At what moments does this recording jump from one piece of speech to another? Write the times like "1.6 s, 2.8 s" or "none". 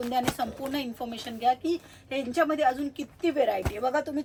none